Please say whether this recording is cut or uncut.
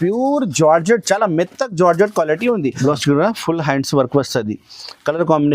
cut